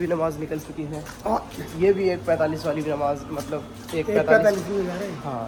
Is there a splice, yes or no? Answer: no